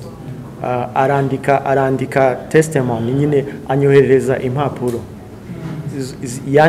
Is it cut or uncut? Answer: uncut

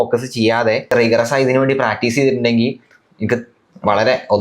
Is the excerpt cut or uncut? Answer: cut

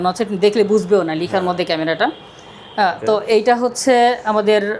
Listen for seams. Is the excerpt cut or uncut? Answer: uncut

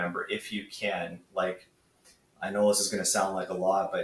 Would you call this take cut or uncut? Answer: uncut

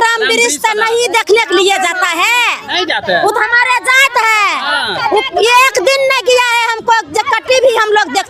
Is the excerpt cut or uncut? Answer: uncut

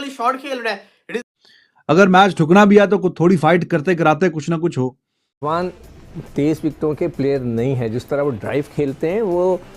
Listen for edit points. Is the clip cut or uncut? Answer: cut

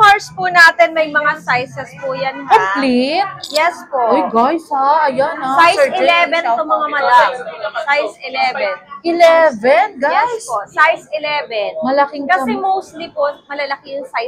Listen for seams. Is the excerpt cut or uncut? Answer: uncut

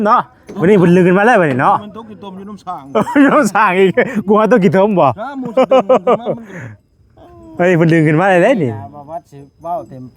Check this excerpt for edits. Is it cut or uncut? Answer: uncut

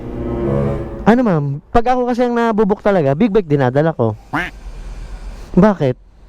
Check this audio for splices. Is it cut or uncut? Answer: cut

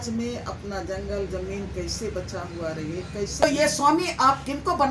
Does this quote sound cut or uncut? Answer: cut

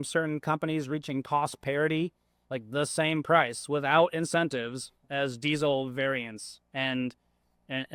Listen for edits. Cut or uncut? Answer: uncut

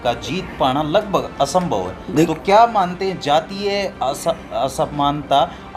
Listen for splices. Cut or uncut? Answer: uncut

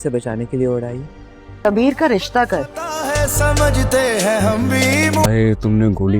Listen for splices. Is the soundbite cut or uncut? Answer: cut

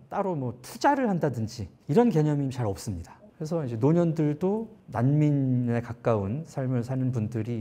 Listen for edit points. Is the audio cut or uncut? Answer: cut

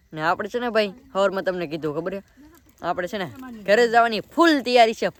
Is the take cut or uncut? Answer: uncut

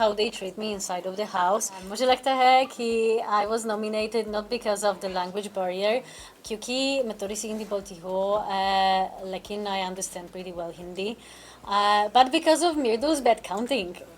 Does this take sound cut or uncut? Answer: cut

